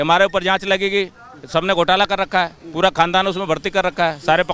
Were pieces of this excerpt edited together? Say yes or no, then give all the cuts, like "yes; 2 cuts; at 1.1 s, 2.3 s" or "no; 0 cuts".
no; 0 cuts